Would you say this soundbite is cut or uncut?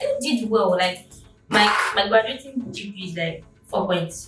uncut